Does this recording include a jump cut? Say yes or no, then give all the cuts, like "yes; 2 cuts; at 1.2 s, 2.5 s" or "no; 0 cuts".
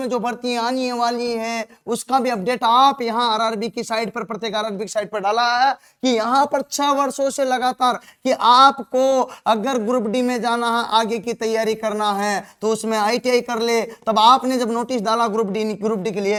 no; 0 cuts